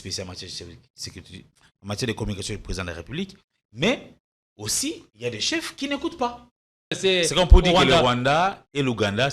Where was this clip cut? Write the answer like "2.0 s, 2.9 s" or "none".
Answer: 7.0 s